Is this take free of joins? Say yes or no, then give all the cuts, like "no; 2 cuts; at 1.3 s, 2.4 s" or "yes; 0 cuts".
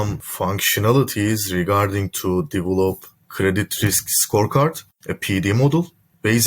yes; 0 cuts